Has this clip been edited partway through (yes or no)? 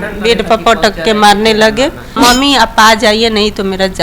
yes